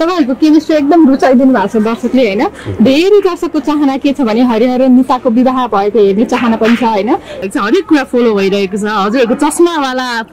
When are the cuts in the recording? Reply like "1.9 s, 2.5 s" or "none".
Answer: 7.4 s